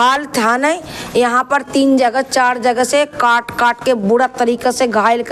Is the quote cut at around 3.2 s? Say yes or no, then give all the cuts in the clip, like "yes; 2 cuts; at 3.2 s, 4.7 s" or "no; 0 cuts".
no; 0 cuts